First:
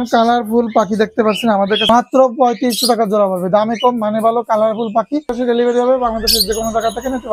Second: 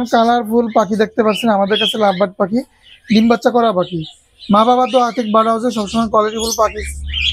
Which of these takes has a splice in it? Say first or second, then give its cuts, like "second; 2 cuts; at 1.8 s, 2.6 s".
first; 2 cuts; at 1.9 s, 5.3 s